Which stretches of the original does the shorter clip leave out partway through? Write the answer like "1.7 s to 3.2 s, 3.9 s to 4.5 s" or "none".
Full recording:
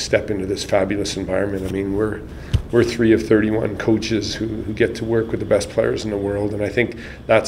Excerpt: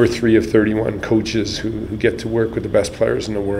none